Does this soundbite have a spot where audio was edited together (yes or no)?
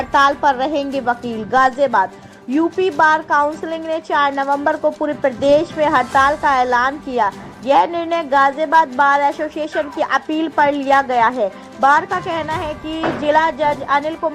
no